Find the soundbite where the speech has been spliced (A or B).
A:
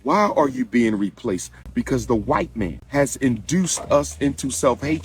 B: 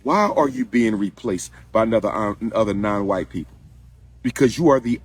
A